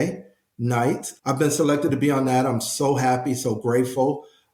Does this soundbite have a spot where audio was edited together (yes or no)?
no